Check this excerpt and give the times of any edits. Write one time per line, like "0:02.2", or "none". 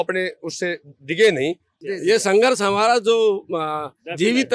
0:01.7